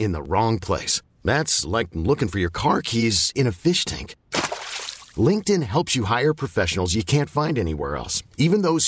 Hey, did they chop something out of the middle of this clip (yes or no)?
no